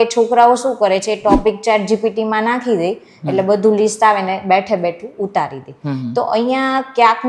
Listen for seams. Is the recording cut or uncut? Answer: uncut